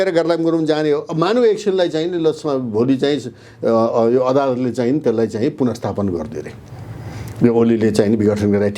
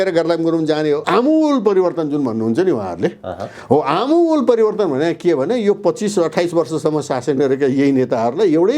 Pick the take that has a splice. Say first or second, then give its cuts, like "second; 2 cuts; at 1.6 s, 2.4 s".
second; 1 cut; at 1.0 s